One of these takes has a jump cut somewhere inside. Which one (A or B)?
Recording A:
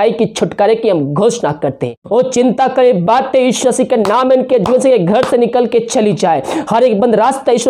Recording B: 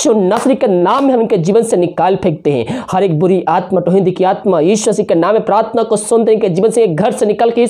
A